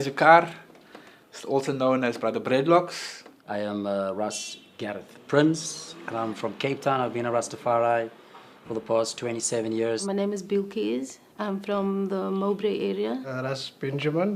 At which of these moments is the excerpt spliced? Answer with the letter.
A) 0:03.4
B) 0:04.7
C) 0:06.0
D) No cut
B